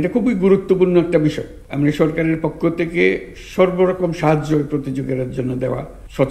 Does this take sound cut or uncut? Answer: uncut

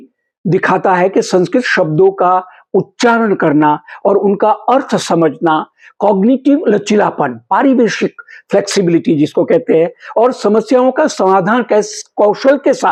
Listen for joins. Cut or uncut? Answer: uncut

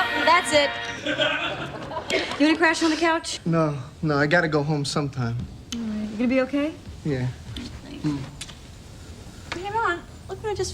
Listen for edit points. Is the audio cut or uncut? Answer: cut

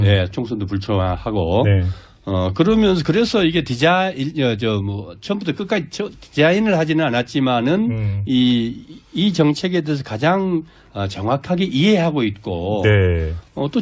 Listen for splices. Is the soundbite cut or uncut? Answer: uncut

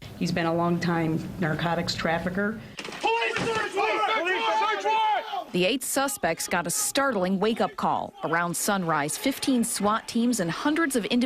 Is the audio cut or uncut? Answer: cut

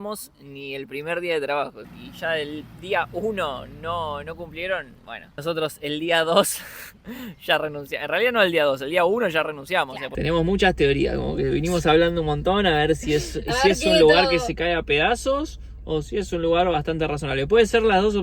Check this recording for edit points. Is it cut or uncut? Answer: cut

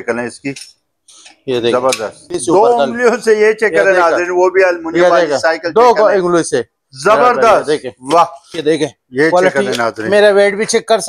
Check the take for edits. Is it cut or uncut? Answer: cut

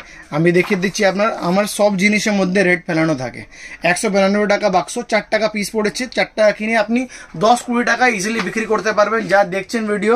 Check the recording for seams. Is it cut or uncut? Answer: uncut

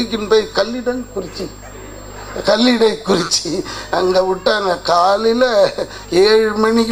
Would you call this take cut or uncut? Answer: uncut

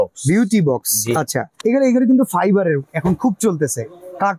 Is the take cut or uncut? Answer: cut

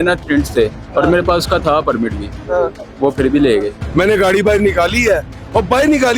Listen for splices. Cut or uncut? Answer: cut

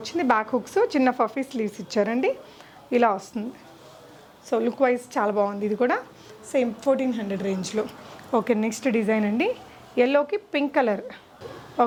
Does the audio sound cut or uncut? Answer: uncut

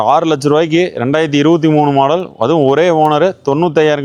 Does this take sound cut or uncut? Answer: uncut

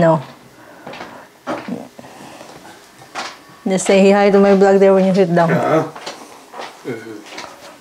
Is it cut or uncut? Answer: uncut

